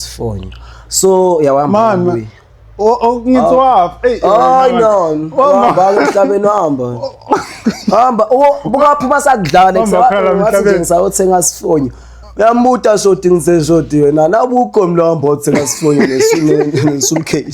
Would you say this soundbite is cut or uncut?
uncut